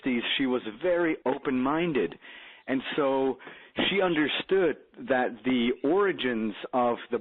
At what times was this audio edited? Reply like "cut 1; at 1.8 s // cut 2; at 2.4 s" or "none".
none